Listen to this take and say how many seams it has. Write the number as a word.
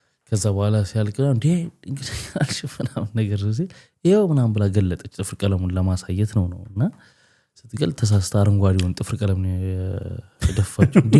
zero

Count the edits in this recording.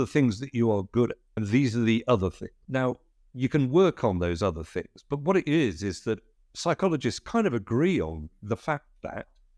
two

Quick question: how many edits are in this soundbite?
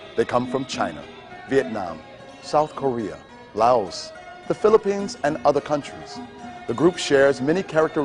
one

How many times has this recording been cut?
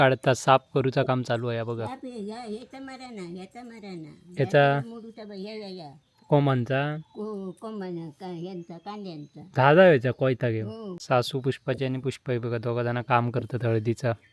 one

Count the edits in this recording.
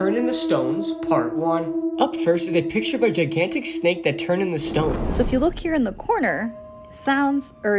one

